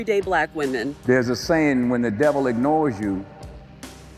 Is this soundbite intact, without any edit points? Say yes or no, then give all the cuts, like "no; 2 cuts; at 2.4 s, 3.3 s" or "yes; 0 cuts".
no; 1 cut; at 0.9 s